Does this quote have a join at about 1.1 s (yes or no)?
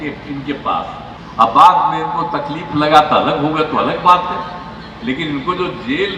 yes